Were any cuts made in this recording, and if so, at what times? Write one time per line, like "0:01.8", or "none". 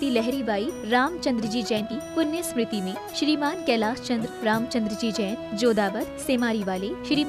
0:01.8